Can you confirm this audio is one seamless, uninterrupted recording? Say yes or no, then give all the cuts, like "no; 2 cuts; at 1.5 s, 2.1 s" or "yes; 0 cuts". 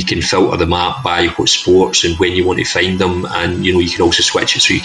yes; 0 cuts